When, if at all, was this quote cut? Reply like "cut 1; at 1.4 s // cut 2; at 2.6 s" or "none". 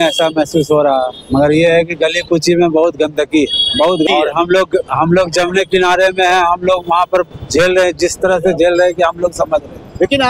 cut 1; at 4.1 s